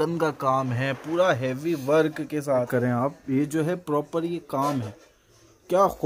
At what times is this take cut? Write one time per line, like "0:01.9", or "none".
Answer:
0:02.7